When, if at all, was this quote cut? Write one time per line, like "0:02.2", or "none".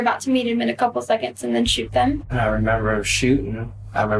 0:02.3